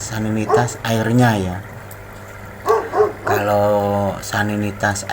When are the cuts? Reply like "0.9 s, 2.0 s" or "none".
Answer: 2.5 s, 3.4 s